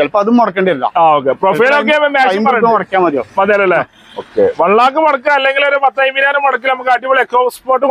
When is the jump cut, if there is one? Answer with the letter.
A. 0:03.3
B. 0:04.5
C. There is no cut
C